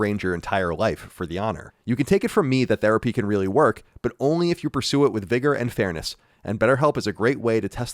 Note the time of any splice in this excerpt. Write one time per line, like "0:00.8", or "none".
0:01.7